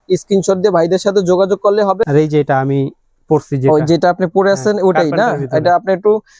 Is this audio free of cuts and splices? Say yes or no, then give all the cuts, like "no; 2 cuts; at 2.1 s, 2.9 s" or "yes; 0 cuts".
no; 1 cut; at 2.0 s